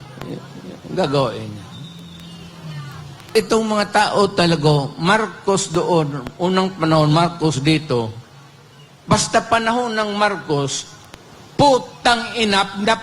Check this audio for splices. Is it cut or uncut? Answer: cut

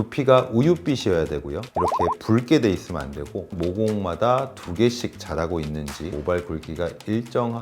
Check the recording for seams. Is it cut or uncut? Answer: cut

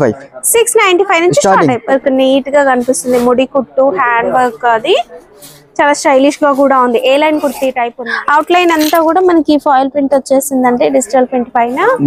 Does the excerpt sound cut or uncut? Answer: cut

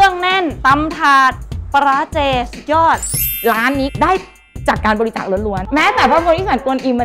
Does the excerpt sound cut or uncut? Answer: uncut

